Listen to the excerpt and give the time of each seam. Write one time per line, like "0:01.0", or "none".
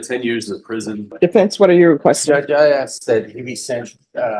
0:01.1